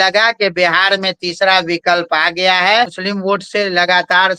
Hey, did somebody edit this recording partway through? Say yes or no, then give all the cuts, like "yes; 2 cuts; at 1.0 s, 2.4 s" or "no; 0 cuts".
yes; 1 cut; at 3.0 s